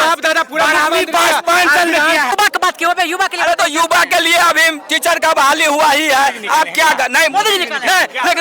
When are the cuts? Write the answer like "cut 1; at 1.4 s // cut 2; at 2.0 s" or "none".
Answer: cut 1; at 2.3 s

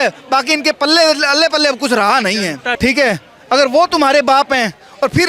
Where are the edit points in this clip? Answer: cut 1; at 2.6 s

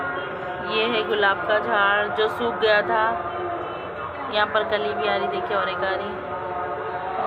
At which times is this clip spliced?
none

